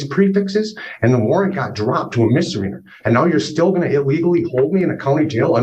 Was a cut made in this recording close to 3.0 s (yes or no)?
no